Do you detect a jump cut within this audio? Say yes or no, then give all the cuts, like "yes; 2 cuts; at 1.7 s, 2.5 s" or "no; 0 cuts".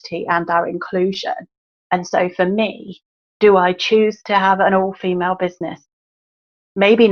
no; 0 cuts